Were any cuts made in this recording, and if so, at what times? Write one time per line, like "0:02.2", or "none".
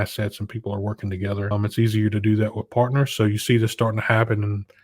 0:01.5